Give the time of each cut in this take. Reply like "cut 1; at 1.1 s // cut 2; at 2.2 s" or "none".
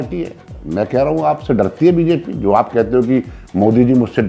none